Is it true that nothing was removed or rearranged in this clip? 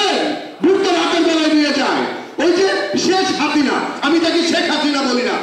yes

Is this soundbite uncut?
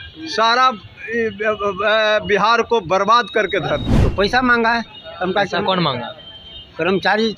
no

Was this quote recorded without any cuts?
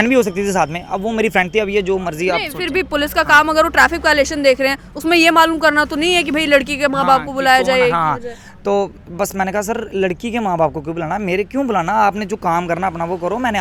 yes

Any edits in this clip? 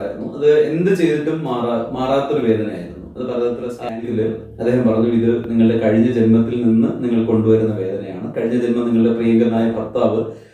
yes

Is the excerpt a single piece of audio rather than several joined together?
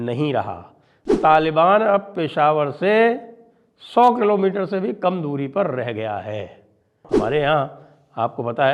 no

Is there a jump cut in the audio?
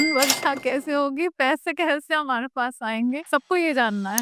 yes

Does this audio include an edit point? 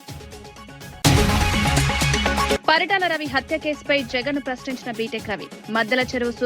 yes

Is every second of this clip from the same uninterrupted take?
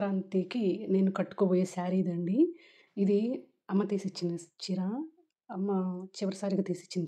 yes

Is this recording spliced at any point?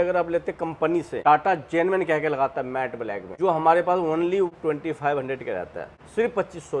yes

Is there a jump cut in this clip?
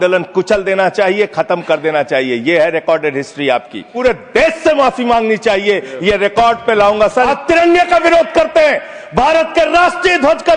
yes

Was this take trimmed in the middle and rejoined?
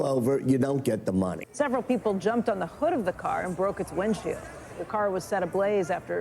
yes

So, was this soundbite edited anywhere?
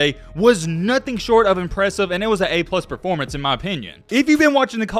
no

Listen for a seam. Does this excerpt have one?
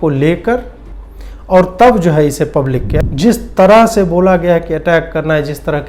yes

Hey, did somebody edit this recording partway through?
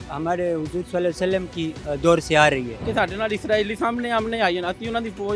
yes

